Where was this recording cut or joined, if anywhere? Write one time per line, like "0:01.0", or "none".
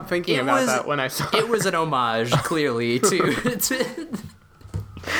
none